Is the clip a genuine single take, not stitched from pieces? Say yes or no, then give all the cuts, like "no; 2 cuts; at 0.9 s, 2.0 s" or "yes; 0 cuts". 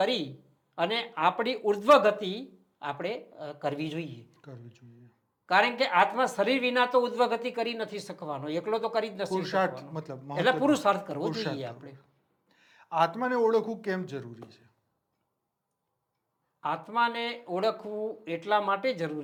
yes; 0 cuts